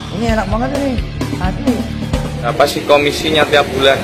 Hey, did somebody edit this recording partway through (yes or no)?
yes